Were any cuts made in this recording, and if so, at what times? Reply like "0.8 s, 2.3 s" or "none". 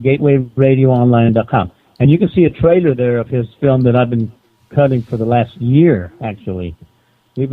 2.8 s